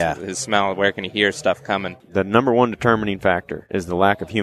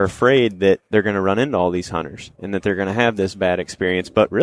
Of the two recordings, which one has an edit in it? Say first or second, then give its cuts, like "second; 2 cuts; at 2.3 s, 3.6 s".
first; 1 cut; at 2.0 s